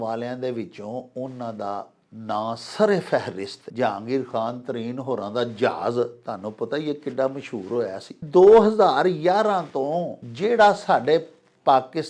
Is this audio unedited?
no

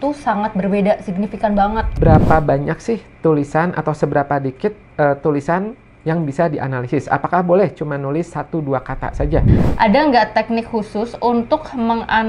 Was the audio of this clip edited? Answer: yes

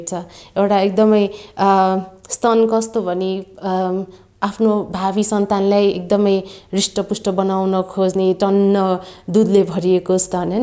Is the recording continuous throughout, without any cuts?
yes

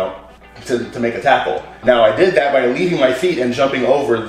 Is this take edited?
no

